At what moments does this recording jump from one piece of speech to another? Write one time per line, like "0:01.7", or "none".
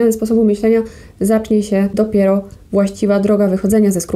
0:01.9